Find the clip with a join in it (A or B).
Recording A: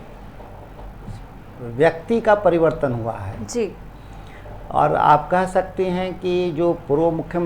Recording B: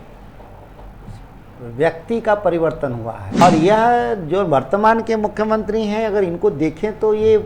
B